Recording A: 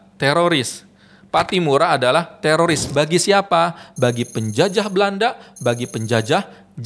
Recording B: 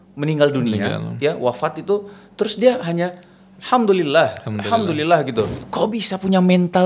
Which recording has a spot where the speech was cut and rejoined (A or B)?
B